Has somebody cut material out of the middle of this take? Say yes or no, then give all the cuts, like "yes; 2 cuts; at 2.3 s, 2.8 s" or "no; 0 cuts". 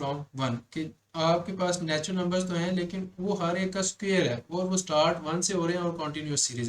no; 0 cuts